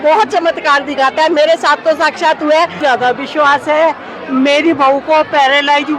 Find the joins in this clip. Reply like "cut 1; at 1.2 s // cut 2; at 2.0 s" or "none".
cut 1; at 2.8 s